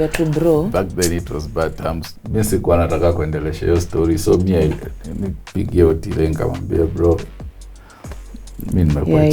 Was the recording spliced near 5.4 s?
no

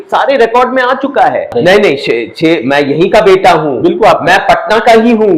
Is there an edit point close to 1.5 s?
yes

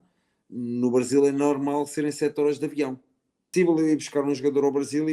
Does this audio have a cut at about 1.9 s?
no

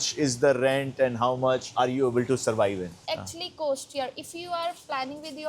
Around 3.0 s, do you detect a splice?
yes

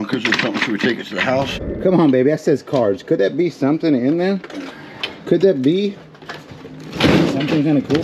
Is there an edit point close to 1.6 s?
yes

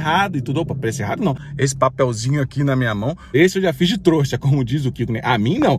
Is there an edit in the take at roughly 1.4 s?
yes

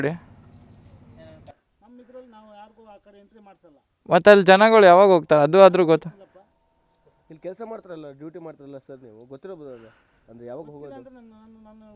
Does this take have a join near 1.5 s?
yes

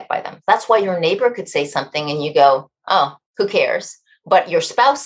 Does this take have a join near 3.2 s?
yes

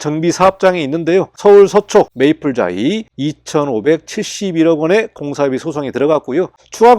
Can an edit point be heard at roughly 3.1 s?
yes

